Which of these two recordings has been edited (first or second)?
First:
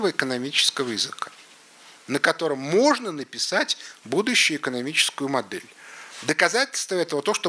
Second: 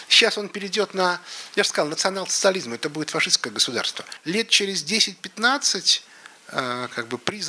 second